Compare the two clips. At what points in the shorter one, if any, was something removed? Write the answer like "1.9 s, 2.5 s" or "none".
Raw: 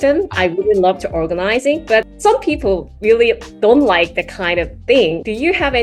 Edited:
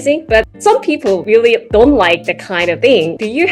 1.4 s, 2.8 s